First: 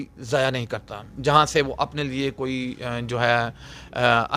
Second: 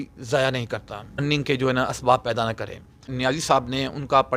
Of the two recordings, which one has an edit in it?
second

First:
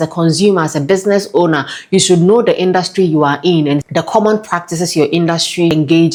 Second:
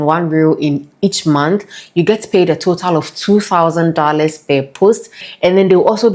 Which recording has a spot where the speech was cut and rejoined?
second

